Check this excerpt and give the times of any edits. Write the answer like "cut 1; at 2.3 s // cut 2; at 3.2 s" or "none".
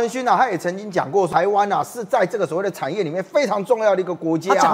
cut 1; at 1.3 s